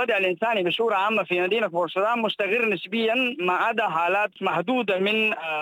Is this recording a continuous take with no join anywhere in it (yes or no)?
no